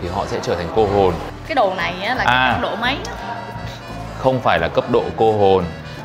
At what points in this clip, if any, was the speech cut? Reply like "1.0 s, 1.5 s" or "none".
1.3 s